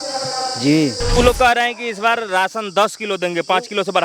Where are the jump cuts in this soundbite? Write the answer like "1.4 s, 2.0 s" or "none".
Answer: 1.2 s